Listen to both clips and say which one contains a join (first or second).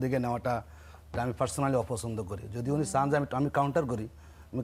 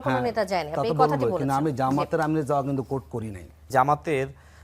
second